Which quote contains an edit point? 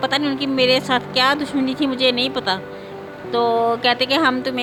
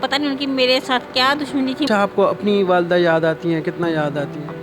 second; 1 cut; at 1.9 s

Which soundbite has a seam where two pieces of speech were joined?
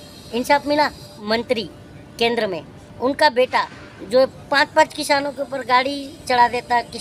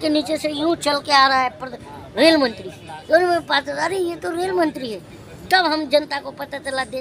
first; 1 cut; at 1.2 s

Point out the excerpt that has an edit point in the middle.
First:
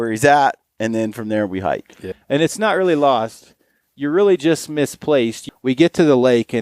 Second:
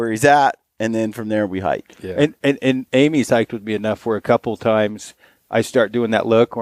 first; 2 cuts; at 2.0 s, 5.4 s

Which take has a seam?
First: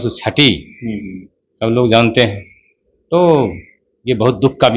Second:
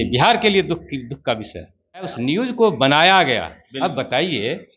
second; 1 cut; at 2.1 s

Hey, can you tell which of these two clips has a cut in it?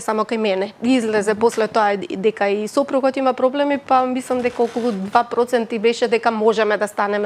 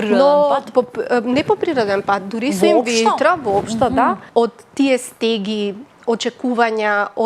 second; 1 cut; at 4.2 s

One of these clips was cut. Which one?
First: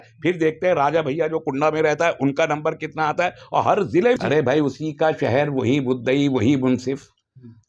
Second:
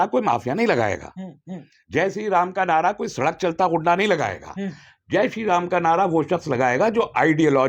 first; 1 cut; at 4.2 s

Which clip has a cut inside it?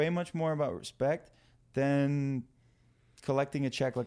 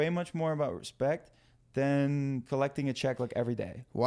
second; 1 cut; at 2.4 s

